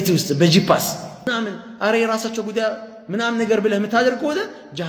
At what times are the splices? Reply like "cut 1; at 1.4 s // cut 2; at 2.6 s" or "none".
cut 1; at 1.3 s